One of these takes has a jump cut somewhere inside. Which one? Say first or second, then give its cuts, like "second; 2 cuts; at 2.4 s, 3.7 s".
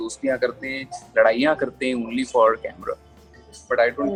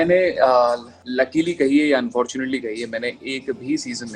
second; 1 cut; at 1.0 s